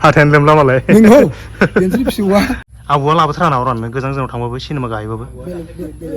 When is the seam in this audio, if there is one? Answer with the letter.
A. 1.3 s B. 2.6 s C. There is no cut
B